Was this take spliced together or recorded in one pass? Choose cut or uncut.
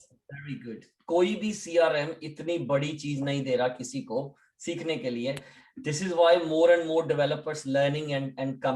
uncut